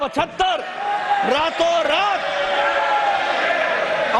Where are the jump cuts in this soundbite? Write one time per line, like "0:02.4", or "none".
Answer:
none